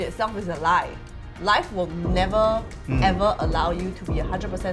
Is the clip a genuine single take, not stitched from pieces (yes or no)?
yes